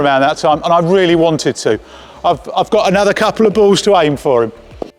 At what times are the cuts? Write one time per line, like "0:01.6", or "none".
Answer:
none